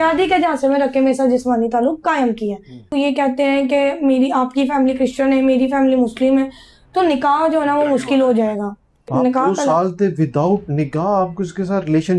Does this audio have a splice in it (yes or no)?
yes